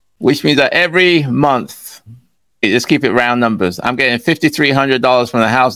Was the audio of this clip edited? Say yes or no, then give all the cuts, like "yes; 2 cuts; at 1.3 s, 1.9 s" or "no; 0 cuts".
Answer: yes; 1 cut; at 2.6 s